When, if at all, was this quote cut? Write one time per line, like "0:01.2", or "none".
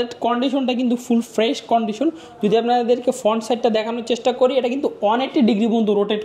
none